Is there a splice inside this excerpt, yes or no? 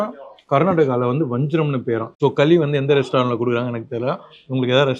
yes